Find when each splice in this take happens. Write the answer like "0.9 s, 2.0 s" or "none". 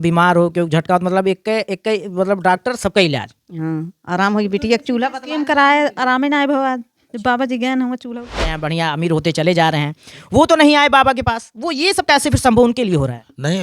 8.5 s

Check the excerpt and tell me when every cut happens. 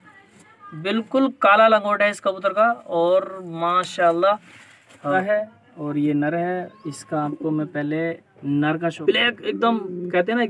5.1 s, 9.0 s

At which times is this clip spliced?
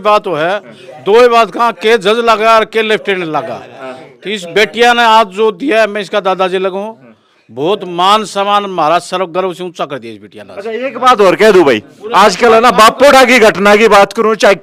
none

